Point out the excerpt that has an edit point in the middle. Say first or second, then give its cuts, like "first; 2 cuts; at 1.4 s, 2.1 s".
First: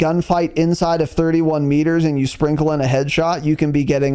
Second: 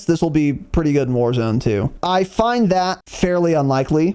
second; 2 cuts; at 1.9 s, 3.0 s